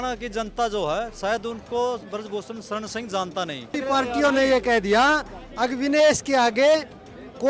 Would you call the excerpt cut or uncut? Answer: cut